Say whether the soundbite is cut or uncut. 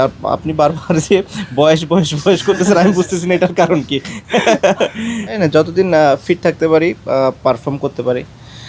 cut